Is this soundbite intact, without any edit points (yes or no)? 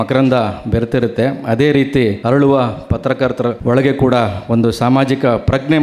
no